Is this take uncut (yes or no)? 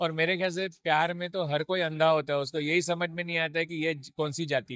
yes